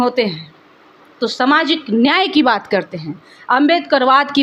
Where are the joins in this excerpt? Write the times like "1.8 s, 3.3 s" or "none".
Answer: none